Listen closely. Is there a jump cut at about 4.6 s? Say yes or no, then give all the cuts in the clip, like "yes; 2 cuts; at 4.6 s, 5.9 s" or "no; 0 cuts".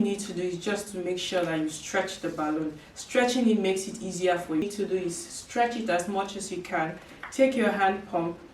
yes; 1 cut; at 4.6 s